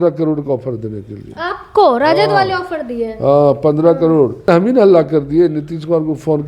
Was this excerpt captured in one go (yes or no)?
no